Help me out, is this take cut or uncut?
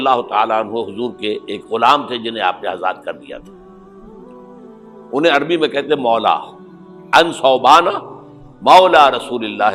uncut